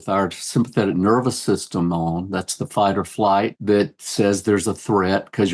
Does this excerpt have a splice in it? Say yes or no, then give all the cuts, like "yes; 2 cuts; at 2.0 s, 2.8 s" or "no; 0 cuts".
yes; 1 cut; at 3.6 s